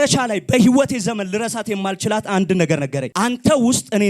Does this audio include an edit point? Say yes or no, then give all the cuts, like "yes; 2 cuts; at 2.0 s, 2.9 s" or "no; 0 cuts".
yes; 1 cut; at 3.0 s